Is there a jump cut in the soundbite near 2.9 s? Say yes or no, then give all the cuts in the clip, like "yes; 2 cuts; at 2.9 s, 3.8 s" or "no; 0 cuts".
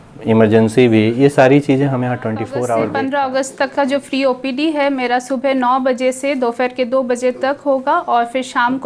yes; 1 cut; at 2.9 s